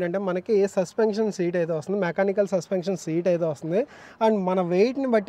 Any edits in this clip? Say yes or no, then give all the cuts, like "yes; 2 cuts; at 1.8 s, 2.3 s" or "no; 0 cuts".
no; 0 cuts